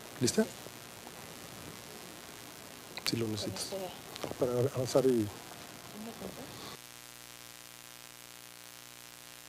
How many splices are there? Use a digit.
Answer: 1